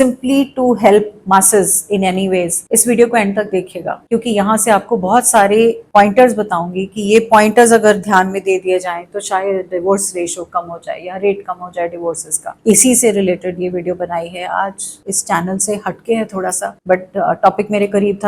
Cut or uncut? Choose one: uncut